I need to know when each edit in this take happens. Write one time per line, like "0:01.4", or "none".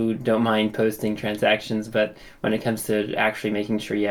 none